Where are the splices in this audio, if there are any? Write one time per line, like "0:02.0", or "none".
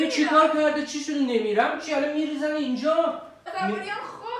0:03.4

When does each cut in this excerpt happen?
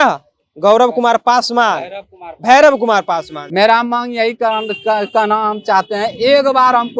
0:03.4

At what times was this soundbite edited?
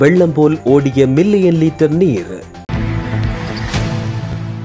0:02.5

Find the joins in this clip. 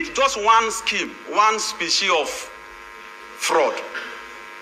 none

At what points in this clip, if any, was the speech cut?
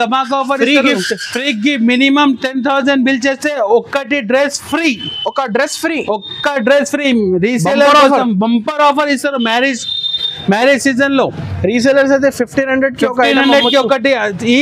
none

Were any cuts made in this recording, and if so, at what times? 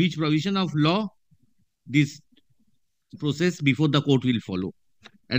none

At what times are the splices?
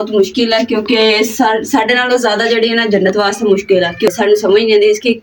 0:04.1

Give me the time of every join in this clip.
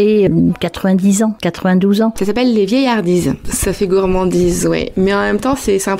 0:02.2

